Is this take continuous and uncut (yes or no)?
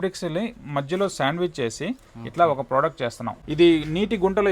no